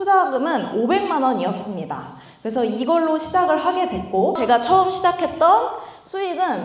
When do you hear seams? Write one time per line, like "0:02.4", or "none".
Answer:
0:04.4